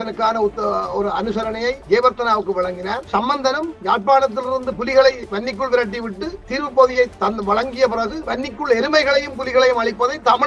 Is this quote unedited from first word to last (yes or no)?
yes